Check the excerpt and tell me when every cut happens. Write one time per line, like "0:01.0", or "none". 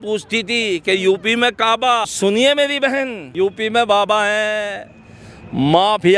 0:02.1
0:03.2

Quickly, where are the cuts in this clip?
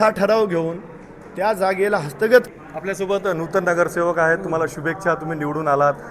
0:02.5

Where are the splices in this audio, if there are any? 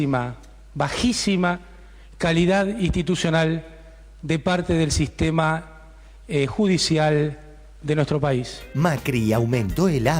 0:08.6

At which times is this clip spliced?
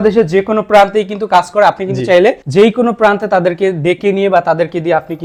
none

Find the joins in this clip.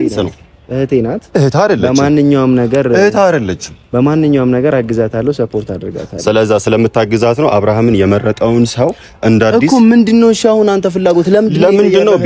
none

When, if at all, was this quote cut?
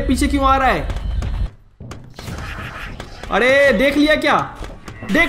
0:01.5

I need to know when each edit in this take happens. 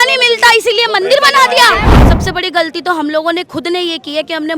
0:01.9

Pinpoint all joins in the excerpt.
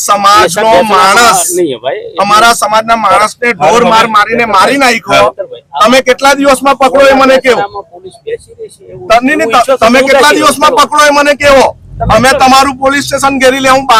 none

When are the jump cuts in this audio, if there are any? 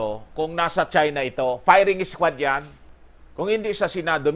0:02.8

